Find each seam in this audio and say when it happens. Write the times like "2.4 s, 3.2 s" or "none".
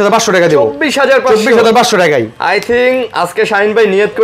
none